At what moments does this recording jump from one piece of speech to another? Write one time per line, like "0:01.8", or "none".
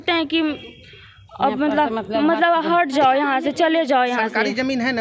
none